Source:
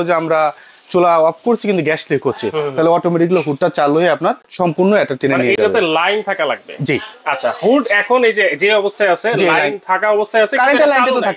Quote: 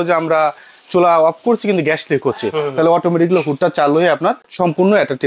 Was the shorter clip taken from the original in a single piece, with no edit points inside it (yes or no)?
yes